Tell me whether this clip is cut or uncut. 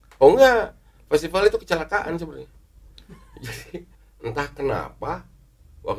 cut